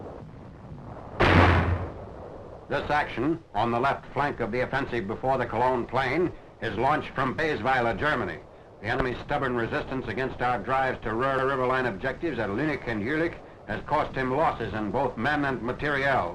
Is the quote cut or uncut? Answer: uncut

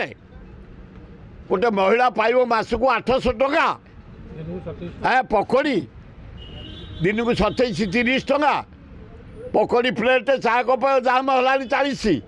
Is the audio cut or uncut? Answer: uncut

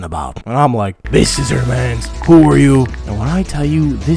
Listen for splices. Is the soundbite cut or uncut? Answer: cut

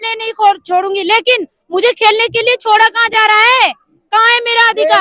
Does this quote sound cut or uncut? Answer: uncut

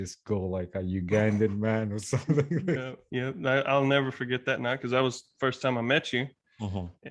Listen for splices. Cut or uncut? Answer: cut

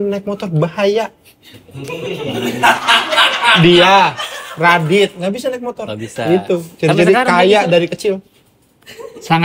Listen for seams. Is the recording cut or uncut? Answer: uncut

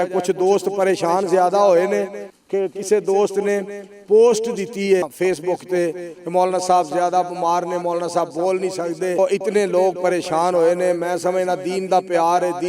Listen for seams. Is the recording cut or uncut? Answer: cut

